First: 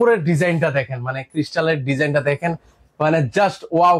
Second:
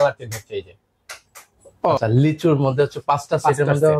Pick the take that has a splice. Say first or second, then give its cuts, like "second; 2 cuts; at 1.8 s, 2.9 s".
second; 1 cut; at 2.0 s